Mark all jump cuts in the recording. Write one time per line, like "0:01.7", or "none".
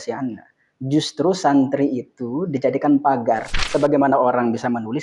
0:03.5